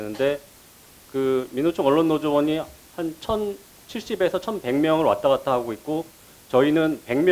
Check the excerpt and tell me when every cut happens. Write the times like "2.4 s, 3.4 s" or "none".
none